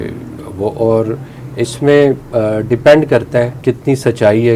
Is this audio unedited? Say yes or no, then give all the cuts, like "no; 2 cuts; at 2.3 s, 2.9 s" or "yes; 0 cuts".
no; 2 cuts; at 2.2 s, 3.5 s